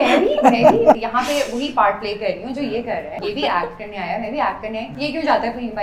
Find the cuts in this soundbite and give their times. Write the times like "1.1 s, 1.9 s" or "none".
1.0 s, 3.2 s, 4.9 s